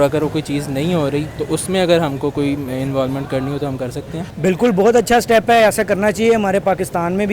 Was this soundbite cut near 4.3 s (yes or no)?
yes